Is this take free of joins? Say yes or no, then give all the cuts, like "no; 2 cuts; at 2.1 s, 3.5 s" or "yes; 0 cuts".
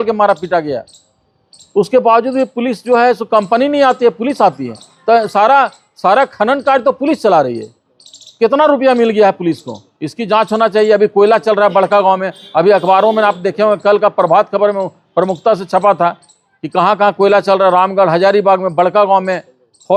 yes; 0 cuts